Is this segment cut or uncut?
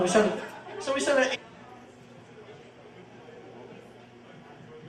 uncut